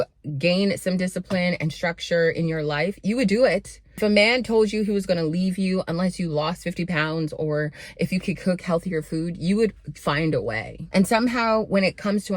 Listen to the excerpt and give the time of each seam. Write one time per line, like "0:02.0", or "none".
0:04.0
0:10.8